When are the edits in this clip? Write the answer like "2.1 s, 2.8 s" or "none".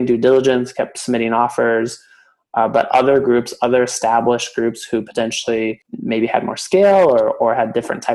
5.9 s